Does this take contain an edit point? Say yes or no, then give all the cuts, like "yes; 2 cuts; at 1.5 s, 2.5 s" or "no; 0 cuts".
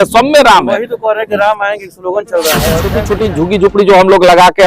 yes; 1 cut; at 3.0 s